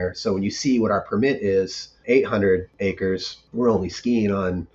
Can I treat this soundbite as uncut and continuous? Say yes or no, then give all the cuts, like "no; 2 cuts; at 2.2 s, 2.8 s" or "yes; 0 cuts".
yes; 0 cuts